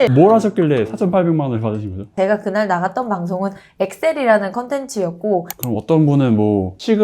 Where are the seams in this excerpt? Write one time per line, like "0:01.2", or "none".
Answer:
0:05.5